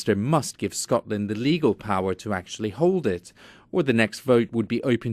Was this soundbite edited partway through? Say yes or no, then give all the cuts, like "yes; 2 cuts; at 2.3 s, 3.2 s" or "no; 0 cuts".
yes; 1 cut; at 2.6 s